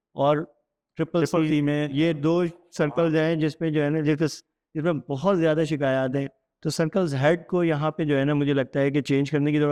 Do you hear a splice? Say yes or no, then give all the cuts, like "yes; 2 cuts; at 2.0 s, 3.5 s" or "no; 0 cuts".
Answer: no; 0 cuts